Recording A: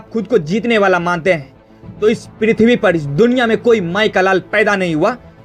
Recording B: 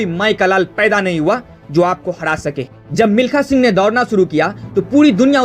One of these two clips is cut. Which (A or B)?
B